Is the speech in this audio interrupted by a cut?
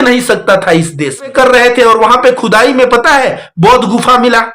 yes; 1 cut; at 1.3 s

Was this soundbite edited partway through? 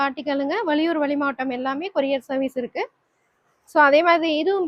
no; 0 cuts

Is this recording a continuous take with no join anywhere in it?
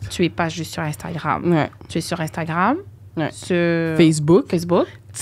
yes; 0 cuts

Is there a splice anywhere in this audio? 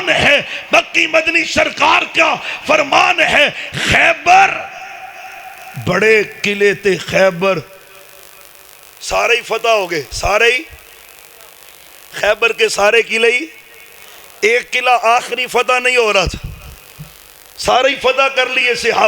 no; 0 cuts

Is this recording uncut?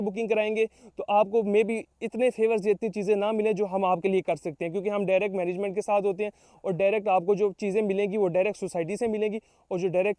yes; 0 cuts

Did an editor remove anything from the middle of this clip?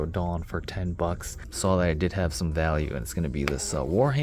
yes; 1 cut; at 1.5 s

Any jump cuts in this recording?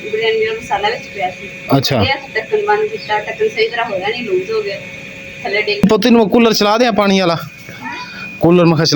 yes; 1 cut; at 5.8 s

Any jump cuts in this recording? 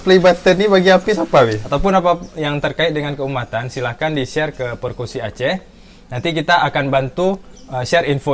yes; 1 cut; at 1.6 s

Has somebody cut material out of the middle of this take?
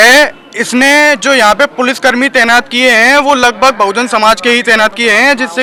no; 0 cuts

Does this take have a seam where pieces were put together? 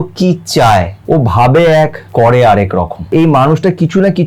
yes; 3 cuts; at 0.9 s, 2.0 s, 3.1 s

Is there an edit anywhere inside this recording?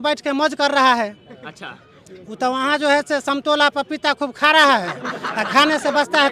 no; 0 cuts

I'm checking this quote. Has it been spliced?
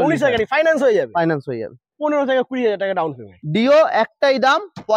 yes; 1 cut; at 3.4 s

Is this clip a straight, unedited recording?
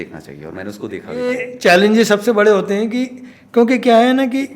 no; 1 cut; at 1.3 s

